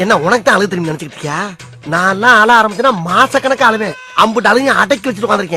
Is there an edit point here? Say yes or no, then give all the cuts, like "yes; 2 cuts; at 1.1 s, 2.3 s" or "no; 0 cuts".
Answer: no; 0 cuts